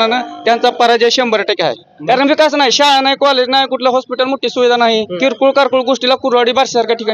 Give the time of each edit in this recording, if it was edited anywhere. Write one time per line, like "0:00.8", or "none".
0:01.9
0:05.1